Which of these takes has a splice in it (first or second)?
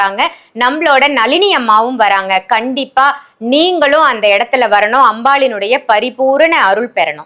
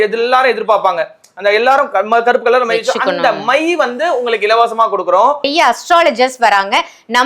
second